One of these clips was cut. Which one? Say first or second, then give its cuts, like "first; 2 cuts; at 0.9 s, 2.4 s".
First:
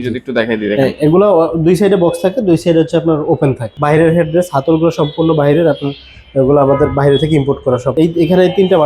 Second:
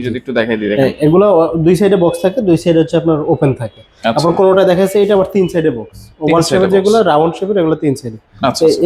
first; 2 cuts; at 3.7 s, 7.9 s